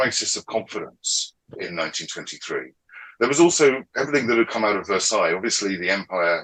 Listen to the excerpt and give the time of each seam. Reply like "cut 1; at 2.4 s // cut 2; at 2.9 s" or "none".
cut 1; at 1.5 s

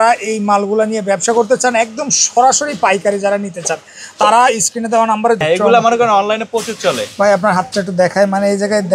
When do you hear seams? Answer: cut 1; at 5.4 s

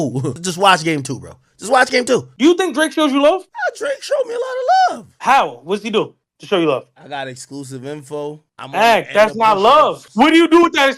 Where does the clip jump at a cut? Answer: cut 1; at 2.3 s // cut 2; at 10.0 s

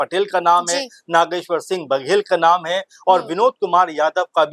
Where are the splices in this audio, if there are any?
none

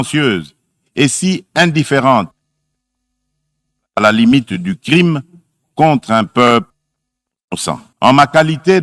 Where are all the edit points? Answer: cut 1; at 7.9 s

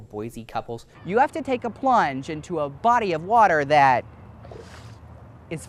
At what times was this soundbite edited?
cut 1; at 0.9 s

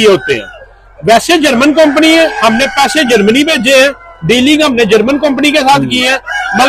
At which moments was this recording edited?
none

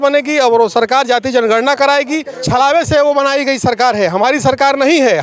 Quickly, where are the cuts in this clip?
cut 1; at 2.3 s

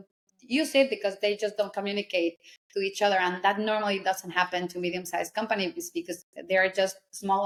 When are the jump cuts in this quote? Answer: none

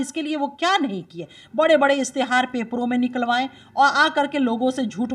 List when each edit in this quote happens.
none

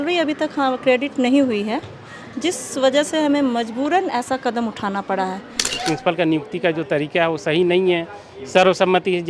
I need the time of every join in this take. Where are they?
cut 1; at 5.7 s

